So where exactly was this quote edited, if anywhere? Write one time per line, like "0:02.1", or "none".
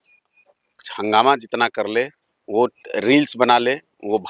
0:00.9